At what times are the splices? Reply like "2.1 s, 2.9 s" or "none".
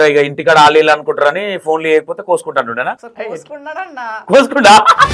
3.1 s, 4.2 s